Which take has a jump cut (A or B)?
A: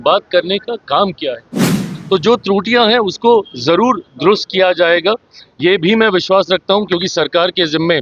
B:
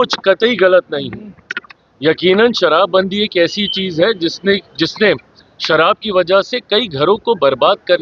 A